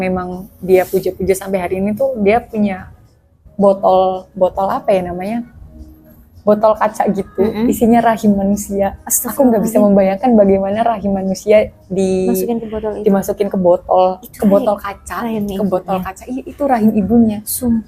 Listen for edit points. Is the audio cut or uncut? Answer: uncut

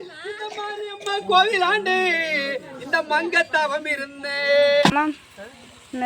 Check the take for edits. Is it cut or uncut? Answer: cut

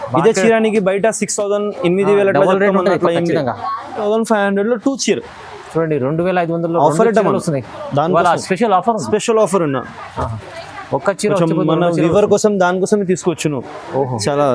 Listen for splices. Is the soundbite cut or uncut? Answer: cut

